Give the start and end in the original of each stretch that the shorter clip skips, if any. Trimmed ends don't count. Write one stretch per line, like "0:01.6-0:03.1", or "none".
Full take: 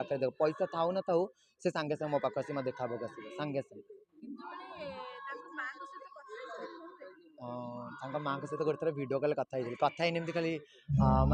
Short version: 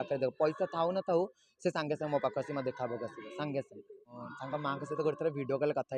0:04.2-0:07.8